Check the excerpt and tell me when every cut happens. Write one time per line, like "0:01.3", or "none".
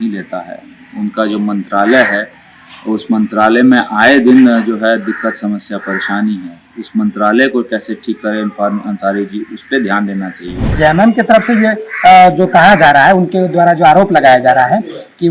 0:10.7